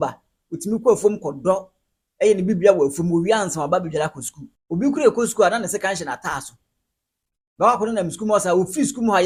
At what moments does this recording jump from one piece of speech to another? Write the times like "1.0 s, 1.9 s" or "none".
none

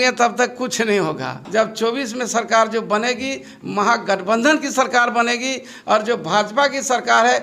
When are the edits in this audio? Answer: 1.3 s

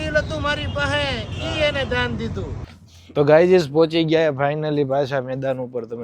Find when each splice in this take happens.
2.6 s

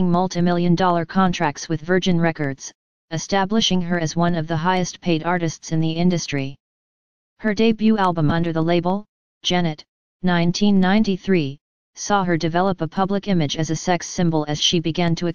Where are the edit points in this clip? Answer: 13.4 s

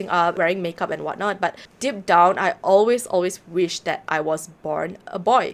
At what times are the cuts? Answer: none

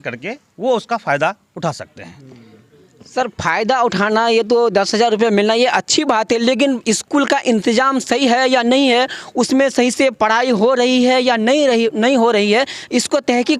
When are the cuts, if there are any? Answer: none

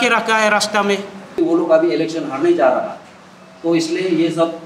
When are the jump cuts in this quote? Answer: 1.4 s

